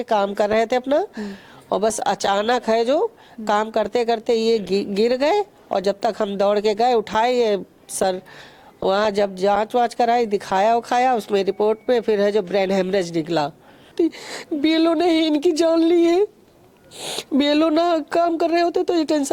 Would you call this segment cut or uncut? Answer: cut